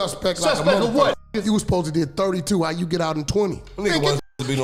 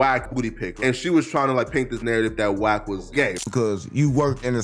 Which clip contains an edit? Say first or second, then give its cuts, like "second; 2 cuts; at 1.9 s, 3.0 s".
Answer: second; 1 cut; at 3.4 s